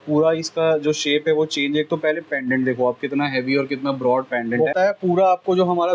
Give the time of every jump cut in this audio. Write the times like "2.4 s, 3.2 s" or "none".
4.7 s